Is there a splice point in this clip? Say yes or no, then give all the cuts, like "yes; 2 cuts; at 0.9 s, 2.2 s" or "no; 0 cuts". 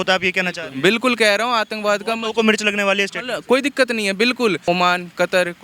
yes; 1 cut; at 4.6 s